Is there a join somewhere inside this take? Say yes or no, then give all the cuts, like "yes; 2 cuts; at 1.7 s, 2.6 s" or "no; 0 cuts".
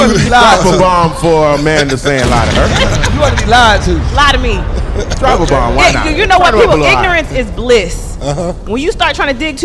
no; 0 cuts